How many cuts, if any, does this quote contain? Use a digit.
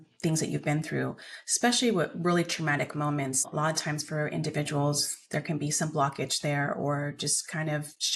0